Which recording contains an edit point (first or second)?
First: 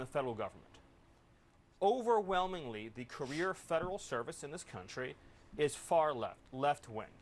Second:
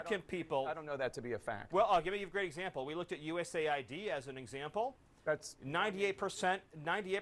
second